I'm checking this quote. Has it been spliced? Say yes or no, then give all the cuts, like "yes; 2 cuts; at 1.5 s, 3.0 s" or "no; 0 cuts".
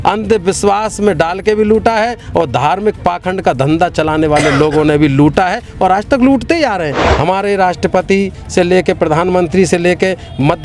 yes; 1 cut; at 7.0 s